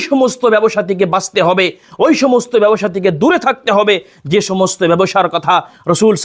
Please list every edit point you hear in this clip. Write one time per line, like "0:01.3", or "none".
none